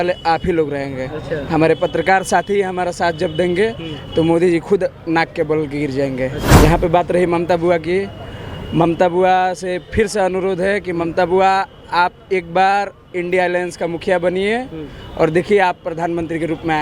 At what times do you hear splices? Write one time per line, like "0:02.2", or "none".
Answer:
0:06.4